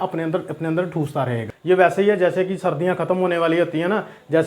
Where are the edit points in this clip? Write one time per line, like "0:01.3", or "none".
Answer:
0:01.5